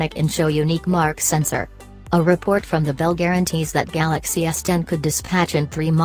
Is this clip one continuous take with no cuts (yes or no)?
no